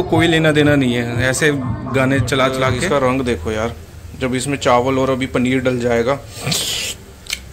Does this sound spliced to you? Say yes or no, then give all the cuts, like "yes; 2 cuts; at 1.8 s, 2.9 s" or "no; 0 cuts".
yes; 1 cut; at 2.8 s